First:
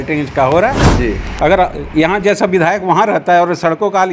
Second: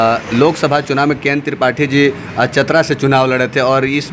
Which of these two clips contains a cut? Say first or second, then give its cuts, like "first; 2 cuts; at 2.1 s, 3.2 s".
first; 1 cut; at 1.3 s